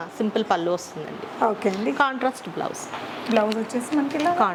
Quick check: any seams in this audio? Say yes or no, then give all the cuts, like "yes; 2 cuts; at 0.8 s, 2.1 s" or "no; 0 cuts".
no; 0 cuts